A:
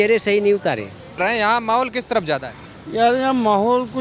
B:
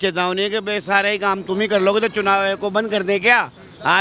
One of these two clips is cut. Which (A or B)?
A